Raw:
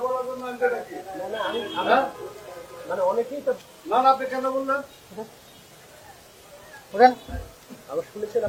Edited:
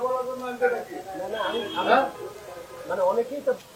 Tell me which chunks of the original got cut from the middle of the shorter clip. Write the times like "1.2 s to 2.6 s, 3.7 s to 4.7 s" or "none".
none

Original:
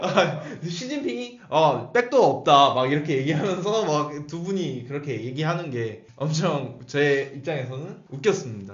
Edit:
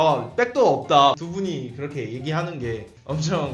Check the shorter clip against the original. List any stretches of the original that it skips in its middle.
2.7 s to 4.3 s

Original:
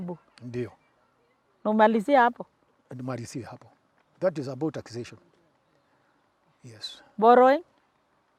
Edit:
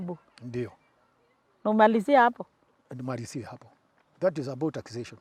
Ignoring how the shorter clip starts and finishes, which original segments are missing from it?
none

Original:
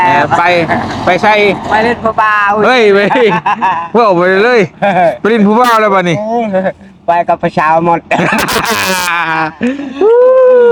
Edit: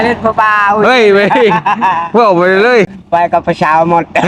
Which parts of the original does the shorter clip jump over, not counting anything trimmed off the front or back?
4.7 s to 6.9 s

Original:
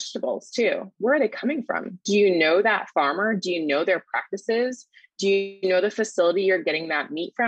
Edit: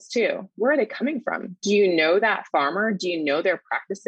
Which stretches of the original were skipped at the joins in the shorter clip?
none

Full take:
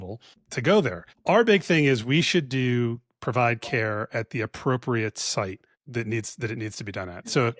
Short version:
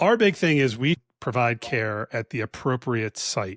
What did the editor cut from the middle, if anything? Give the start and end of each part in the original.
2.3 s to 3.0 s

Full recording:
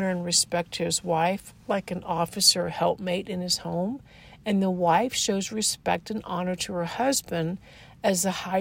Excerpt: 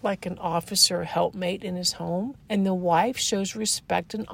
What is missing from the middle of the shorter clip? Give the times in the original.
4.0 s to 4.3 s

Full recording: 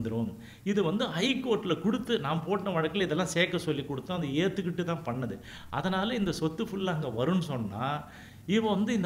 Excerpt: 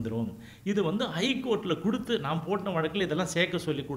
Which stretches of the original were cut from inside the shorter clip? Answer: none

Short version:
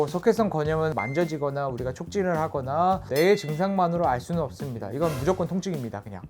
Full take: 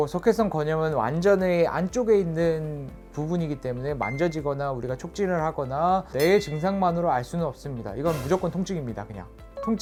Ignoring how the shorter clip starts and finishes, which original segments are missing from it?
0.9 s to 4.0 s

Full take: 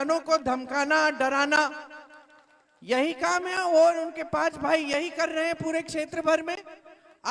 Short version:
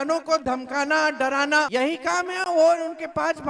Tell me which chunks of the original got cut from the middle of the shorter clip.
1.7 s to 2.9 s

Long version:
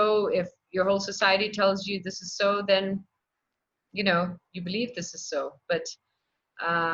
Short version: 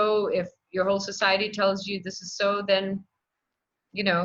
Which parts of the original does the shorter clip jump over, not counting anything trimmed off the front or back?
none

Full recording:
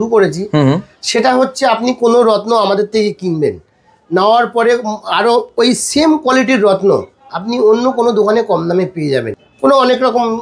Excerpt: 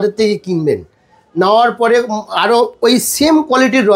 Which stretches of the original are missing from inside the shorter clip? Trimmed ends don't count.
none

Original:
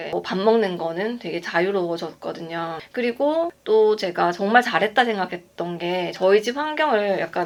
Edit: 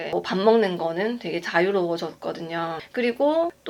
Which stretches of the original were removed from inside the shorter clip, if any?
none

